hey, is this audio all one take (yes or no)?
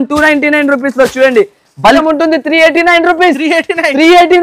no